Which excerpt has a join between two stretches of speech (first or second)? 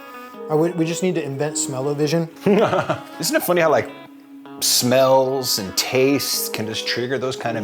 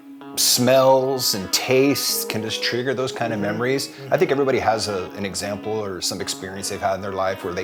first